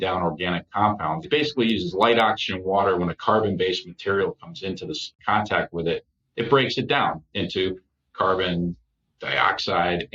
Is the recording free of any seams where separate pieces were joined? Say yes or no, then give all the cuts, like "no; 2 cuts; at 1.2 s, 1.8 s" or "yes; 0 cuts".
no; 2 cuts; at 1.2 s, 5.2 s